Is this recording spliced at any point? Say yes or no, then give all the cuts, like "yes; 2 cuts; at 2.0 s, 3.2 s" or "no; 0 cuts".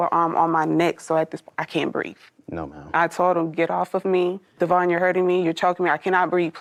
no; 0 cuts